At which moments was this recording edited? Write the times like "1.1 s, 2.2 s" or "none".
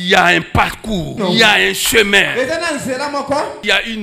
1.1 s